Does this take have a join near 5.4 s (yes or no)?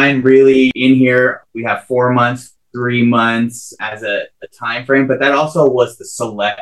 no